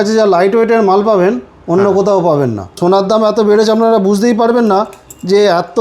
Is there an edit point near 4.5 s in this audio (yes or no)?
no